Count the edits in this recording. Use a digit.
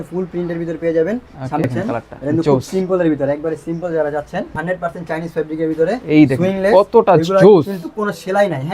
2